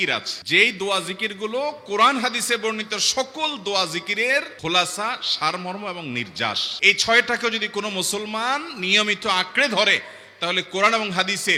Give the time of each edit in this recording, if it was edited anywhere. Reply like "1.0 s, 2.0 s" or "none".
none